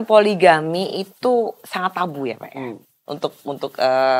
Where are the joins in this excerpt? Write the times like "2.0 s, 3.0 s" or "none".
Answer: none